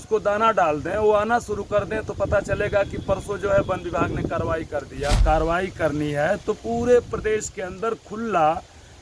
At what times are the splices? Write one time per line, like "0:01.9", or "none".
0:05.2